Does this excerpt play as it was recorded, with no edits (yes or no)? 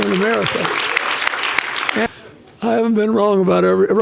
no